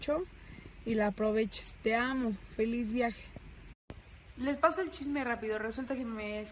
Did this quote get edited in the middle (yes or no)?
yes